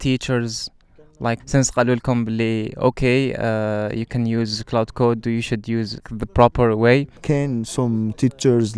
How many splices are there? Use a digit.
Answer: 2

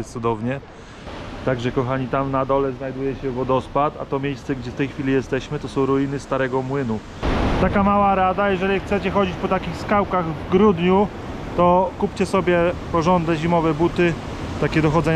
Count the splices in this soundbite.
2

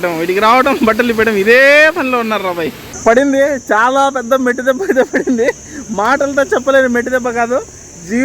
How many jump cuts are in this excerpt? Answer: 1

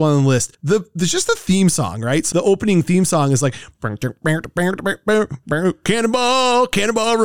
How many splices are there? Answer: 1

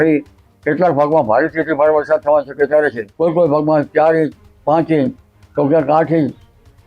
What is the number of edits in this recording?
1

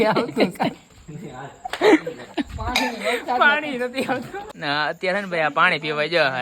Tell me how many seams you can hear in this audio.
1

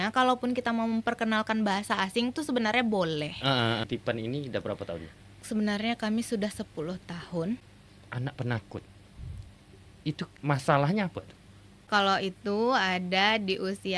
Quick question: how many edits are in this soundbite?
4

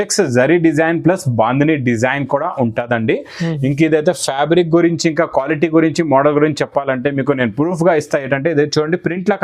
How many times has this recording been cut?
0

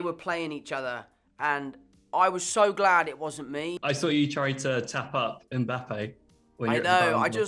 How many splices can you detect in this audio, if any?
1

